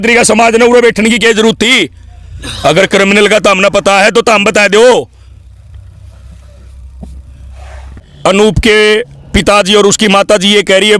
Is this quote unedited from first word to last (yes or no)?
no